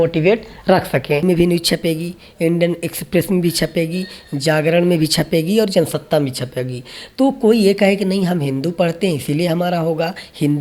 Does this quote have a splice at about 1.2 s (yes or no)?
yes